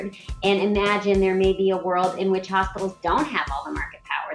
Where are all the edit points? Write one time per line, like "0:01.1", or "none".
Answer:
none